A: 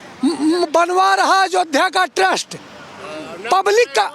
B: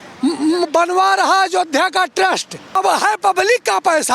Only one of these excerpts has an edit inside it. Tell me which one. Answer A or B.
B